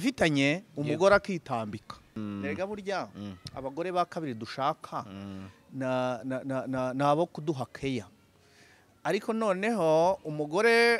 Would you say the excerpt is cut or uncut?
cut